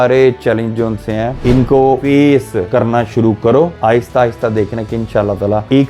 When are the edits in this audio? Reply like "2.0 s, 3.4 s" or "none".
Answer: 1.8 s, 2.7 s, 3.7 s